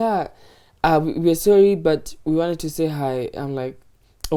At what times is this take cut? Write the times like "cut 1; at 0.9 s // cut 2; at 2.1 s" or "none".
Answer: none